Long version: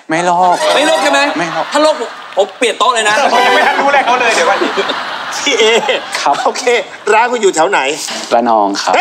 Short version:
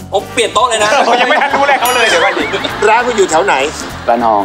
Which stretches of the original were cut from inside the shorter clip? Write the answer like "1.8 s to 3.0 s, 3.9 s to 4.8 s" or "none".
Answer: 4.9 s to 6.9 s